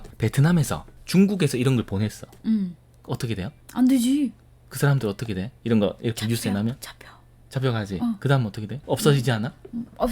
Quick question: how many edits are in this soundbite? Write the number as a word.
one